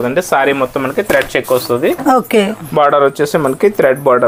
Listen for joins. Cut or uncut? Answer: uncut